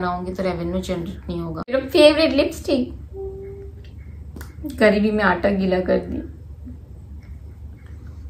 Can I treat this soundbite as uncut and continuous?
no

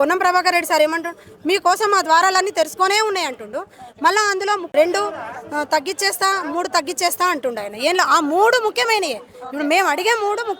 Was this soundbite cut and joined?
yes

